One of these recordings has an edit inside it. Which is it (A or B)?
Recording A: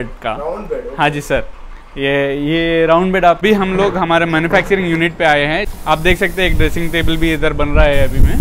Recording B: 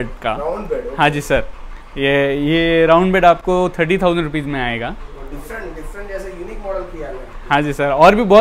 A